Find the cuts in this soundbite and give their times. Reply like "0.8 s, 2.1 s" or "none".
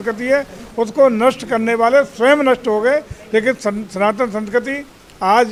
none

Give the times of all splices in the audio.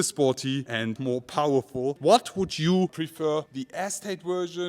1.0 s, 2.0 s

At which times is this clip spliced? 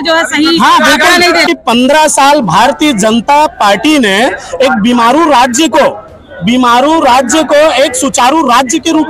1.4 s

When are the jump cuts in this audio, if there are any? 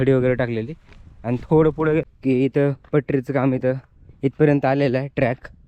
2.1 s

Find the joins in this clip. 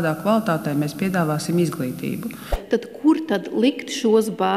2.5 s

